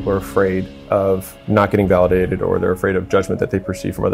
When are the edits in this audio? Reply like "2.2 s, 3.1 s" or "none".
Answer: 1.4 s